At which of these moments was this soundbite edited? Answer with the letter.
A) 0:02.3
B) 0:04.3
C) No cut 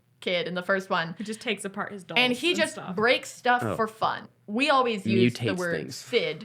B